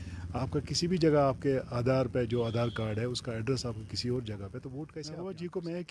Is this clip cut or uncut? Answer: cut